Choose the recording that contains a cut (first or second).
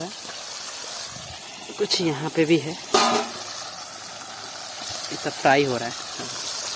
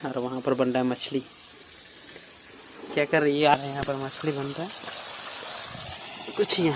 second